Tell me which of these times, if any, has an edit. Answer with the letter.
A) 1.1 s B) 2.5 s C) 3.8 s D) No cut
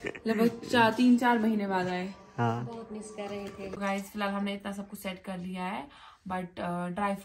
C